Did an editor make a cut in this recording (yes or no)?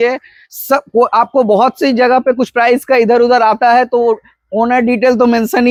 no